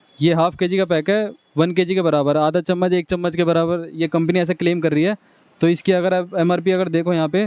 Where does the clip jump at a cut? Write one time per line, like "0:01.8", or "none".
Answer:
none